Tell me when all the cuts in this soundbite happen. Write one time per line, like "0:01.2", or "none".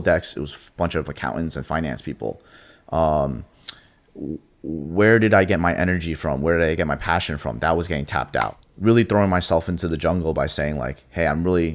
0:08.6